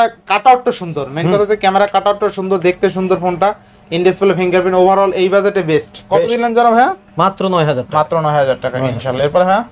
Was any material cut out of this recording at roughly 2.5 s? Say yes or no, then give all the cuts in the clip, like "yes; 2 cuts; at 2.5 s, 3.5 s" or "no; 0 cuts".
no; 0 cuts